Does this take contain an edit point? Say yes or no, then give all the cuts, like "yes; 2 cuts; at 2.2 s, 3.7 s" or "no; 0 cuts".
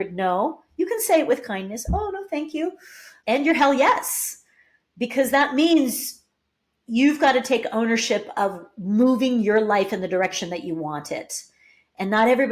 yes; 1 cut; at 3.1 s